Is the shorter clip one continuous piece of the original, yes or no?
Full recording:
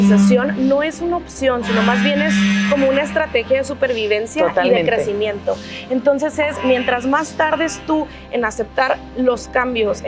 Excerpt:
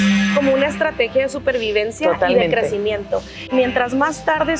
no